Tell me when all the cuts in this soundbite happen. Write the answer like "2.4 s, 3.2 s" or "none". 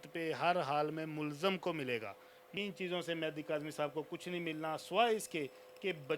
2.6 s